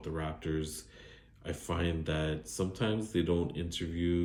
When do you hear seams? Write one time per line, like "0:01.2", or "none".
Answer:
none

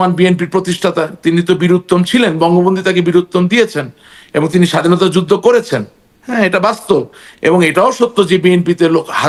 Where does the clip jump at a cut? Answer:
none

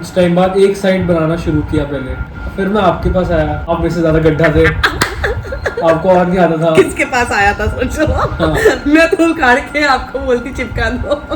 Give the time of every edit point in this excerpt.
0:02.3
0:03.7

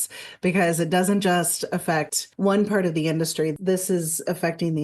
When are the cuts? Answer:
0:02.2
0:03.5

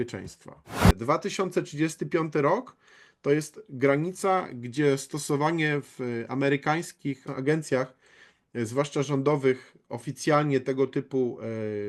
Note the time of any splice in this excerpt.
0:00.9
0:07.3

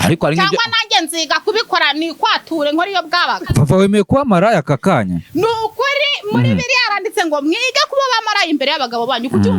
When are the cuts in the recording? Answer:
0:03.4

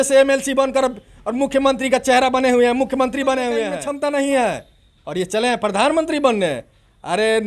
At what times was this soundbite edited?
0:03.8

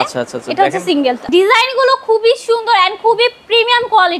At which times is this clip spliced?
0:01.3

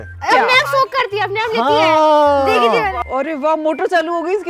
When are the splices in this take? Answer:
0:03.0

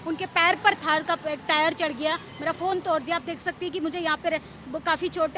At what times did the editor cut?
none

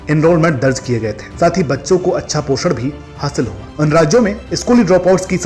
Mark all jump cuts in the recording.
none

